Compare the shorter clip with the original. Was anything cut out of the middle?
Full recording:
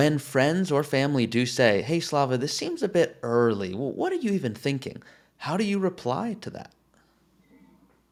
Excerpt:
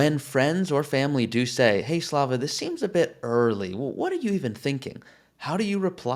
no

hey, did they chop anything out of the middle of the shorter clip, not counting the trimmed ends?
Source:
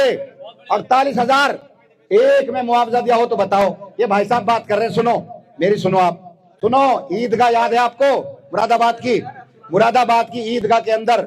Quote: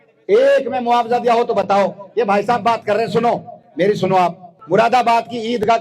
yes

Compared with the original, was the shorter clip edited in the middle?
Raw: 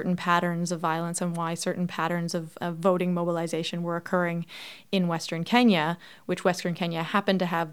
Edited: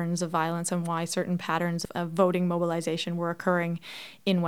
yes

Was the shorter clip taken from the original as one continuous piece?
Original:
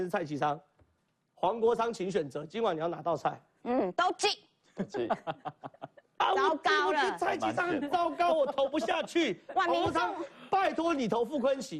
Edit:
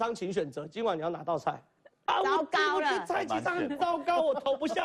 no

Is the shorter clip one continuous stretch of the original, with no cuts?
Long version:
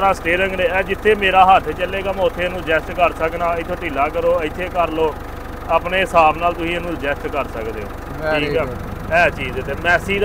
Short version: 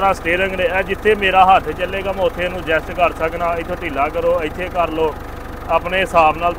yes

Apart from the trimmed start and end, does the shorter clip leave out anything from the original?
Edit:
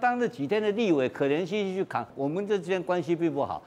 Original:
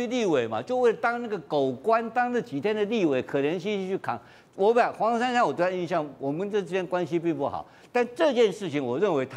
yes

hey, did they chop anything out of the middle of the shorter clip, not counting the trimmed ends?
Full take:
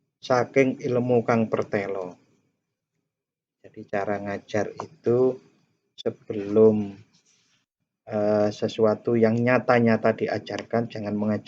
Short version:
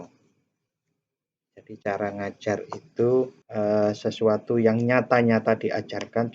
yes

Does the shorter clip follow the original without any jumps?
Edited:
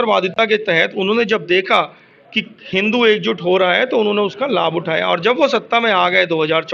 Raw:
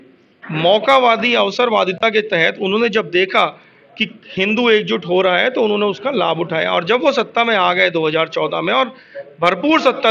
yes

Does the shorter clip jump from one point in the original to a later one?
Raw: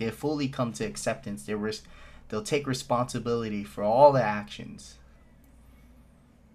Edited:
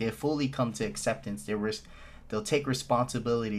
no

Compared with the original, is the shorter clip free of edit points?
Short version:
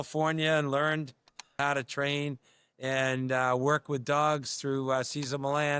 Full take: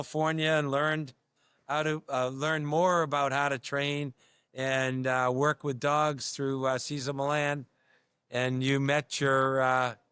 no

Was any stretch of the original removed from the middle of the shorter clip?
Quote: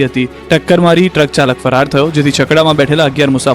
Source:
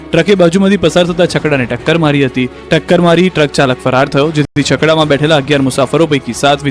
yes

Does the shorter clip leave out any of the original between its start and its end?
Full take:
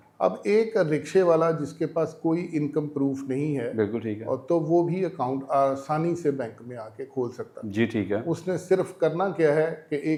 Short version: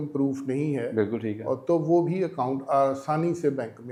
no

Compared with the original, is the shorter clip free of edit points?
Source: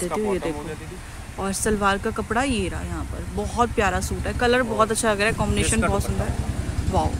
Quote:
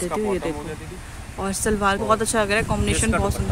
no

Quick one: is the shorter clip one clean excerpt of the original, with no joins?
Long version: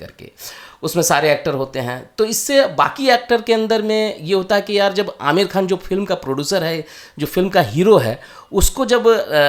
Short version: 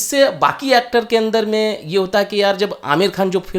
yes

